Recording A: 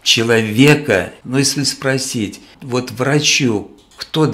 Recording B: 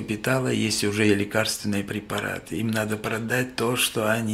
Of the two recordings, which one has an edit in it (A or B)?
A